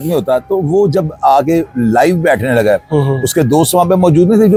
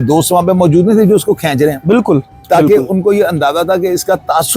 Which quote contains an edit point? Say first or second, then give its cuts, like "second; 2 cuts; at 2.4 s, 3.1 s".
second; 1 cut; at 2.3 s